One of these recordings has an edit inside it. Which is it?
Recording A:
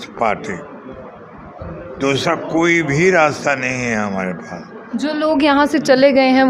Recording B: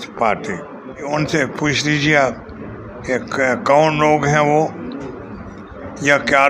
B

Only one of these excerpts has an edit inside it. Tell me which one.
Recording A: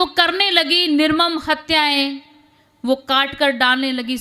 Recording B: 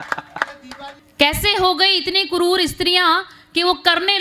B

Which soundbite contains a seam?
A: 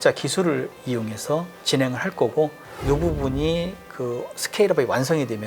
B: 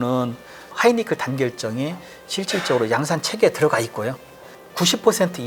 A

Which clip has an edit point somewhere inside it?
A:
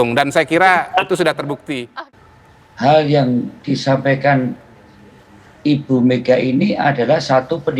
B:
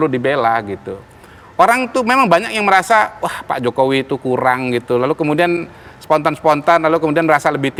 A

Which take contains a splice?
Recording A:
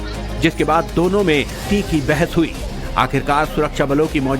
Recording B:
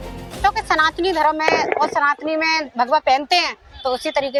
A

